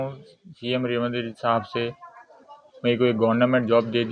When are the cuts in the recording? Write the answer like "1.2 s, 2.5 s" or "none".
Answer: none